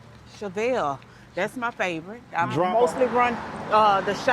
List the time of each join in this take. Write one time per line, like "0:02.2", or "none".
0:02.7